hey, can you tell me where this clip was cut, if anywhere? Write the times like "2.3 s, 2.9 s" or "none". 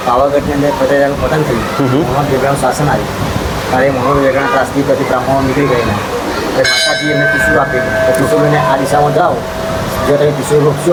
none